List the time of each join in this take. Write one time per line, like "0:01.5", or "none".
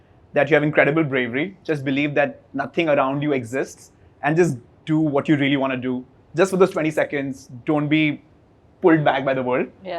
none